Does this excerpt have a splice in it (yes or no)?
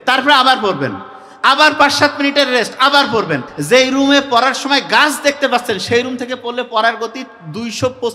yes